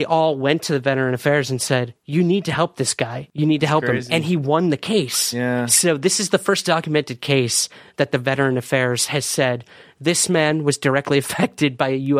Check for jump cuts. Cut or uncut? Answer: cut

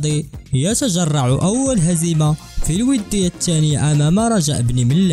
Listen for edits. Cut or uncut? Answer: uncut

